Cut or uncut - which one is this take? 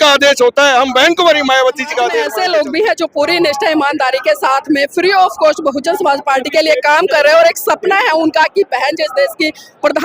cut